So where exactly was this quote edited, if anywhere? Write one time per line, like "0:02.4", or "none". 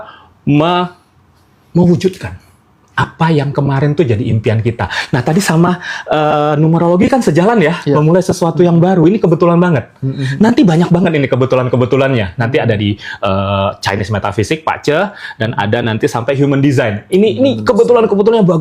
none